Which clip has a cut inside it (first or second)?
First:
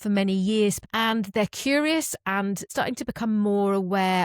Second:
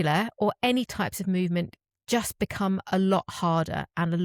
first